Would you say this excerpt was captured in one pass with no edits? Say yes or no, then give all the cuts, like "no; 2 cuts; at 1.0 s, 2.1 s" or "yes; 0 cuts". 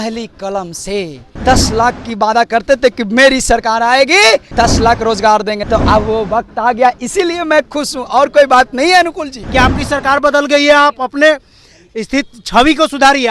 no; 4 cuts; at 1.2 s, 4.5 s, 5.6 s, 9.3 s